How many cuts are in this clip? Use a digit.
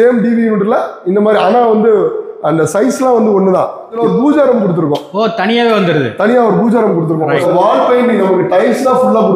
2